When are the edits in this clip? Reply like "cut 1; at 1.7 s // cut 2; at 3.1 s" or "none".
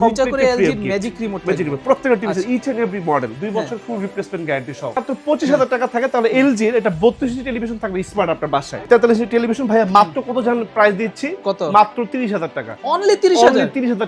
cut 1; at 3.4 s // cut 2; at 5.0 s // cut 3; at 8.8 s